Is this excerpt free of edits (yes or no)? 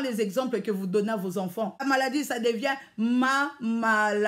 no